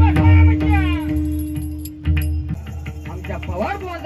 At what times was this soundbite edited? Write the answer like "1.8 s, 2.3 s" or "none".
2.6 s